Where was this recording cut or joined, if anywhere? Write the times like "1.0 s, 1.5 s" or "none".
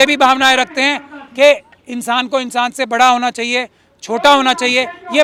none